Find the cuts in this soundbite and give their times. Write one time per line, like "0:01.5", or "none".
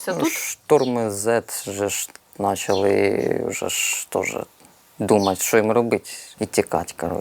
0:06.2